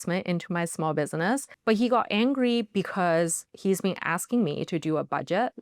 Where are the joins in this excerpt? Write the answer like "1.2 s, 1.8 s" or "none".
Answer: 1.5 s